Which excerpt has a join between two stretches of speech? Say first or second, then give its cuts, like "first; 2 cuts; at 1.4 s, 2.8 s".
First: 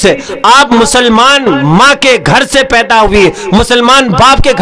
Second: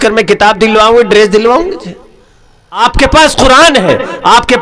second; 1 cut; at 2.8 s